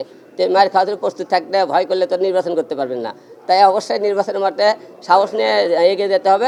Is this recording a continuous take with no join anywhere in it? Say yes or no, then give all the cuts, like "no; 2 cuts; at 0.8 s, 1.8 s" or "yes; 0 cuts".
yes; 0 cuts